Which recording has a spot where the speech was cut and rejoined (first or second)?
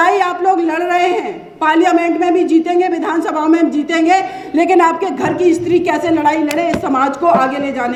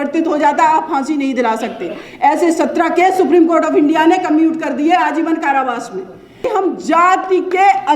second